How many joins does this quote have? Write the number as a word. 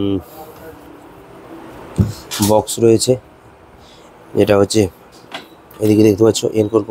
zero